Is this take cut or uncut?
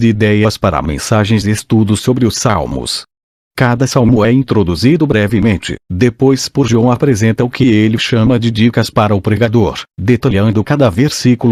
uncut